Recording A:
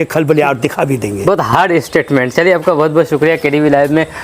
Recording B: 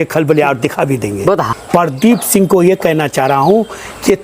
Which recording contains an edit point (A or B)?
B